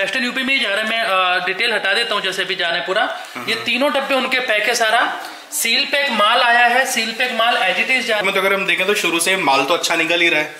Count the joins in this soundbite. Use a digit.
1